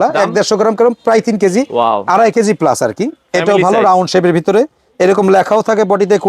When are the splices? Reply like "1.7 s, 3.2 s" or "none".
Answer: 1.7 s